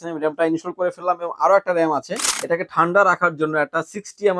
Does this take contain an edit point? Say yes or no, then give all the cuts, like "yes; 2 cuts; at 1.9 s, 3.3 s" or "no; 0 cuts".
yes; 1 cut; at 2.3 s